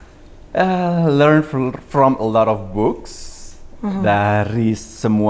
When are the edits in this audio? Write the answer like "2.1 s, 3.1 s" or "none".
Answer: none